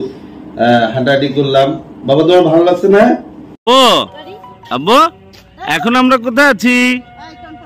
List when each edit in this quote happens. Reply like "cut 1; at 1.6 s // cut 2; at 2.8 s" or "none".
cut 1; at 3.5 s